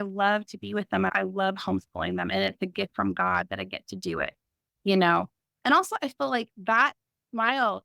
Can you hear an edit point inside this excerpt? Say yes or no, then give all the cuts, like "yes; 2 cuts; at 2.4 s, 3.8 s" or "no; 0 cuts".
yes; 1 cut; at 1.1 s